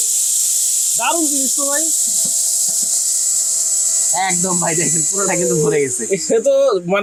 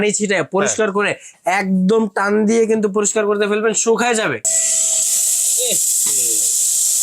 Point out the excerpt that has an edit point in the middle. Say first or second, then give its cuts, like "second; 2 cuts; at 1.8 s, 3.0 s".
second; 1 cut; at 4.4 s